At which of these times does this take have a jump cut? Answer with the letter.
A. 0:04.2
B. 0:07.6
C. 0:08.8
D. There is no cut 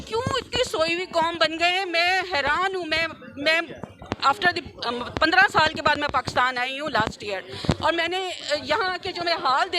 D